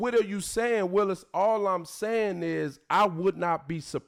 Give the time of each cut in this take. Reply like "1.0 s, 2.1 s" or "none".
none